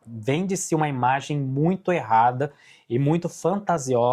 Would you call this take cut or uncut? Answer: uncut